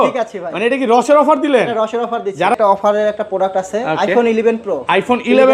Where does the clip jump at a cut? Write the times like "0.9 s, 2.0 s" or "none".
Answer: 2.5 s